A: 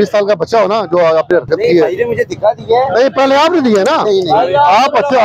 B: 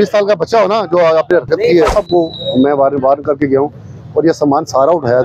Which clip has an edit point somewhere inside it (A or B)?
B